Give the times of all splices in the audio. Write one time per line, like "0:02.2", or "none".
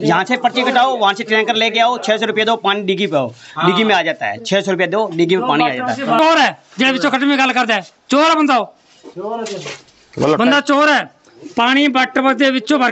0:06.2